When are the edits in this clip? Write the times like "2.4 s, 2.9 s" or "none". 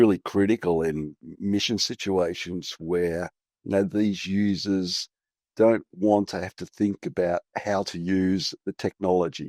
8.6 s